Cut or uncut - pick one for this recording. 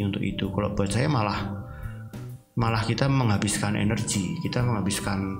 uncut